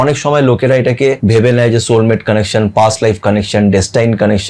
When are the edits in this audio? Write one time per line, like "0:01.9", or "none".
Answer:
0:01.2